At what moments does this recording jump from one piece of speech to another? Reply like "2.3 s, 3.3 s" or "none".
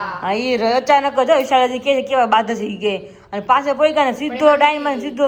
none